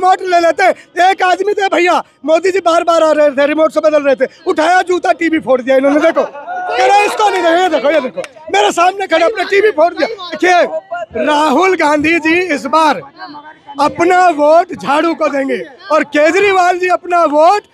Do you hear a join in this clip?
yes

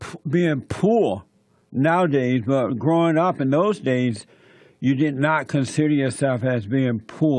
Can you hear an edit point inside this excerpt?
no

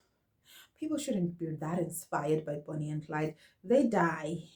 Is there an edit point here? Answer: no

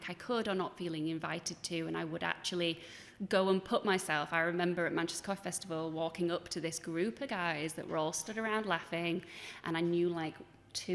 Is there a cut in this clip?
no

